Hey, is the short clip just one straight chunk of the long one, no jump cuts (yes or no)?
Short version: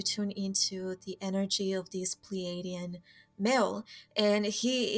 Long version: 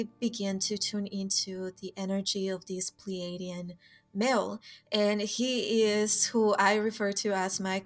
yes